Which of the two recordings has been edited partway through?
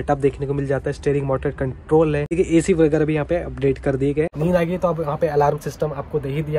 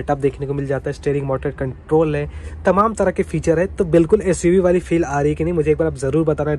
first; 2 cuts; at 2.3 s, 4.3 s

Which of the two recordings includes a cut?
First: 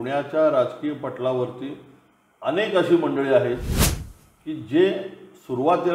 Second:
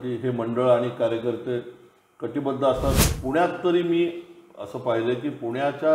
second; 1 cut; at 3.0 s

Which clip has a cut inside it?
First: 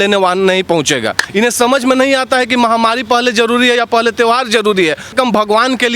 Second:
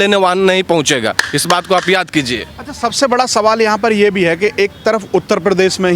first; 2 cuts; at 1.2 s, 5.1 s

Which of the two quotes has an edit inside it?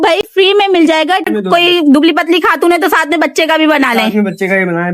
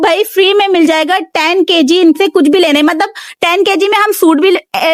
first; 1 cut; at 1.3 s

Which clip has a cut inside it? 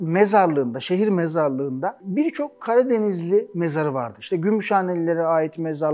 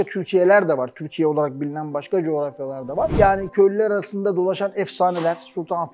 second; 1 cut; at 3.1 s

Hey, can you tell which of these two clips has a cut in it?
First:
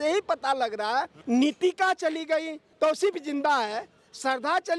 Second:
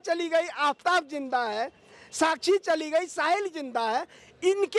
first; 2 cuts; at 1.2 s, 2.7 s

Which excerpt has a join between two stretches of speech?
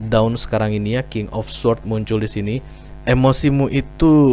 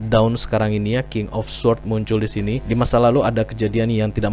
second; 1 cut; at 2.6 s

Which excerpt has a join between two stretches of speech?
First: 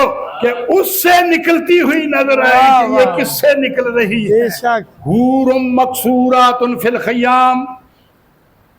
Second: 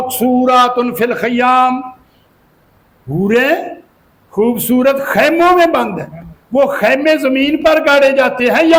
first; 1 cut; at 4.9 s

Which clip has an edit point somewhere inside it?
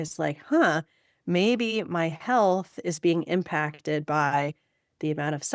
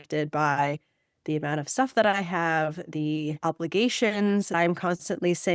second; 2 cuts; at 3.4 s, 4.5 s

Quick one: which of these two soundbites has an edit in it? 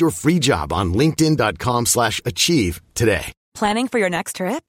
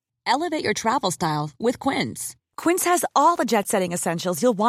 first; 1 cut; at 3.4 s

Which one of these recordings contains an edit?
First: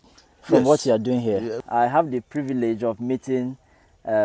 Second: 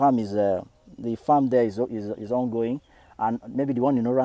first; 1 cut; at 1.6 s

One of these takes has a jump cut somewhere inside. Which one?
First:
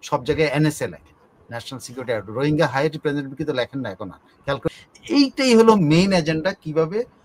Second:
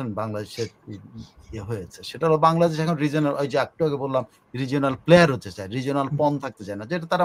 first; 1 cut; at 4.7 s

